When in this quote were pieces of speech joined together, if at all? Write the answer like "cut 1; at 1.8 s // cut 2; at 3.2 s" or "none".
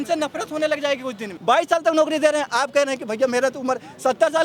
cut 1; at 1.3 s